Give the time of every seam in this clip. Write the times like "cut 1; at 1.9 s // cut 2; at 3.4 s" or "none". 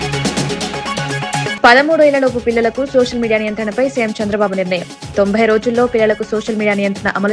cut 1; at 1.5 s